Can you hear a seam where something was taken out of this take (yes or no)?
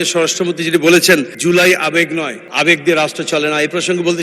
yes